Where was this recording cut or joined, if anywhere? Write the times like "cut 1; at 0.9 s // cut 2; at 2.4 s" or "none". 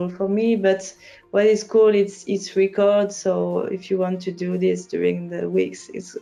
none